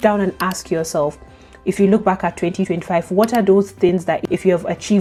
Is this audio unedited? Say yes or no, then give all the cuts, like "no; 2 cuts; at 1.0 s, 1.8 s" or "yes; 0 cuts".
yes; 0 cuts